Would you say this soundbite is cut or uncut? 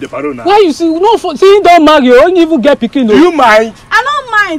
uncut